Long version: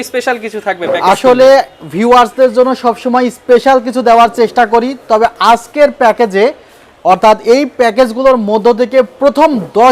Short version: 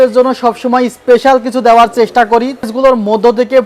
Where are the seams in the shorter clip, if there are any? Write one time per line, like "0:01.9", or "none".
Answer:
0:02.7